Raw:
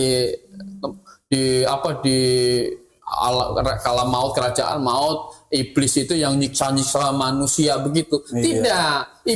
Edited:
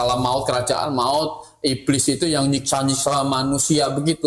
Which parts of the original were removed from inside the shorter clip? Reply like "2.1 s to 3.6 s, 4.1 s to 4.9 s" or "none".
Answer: none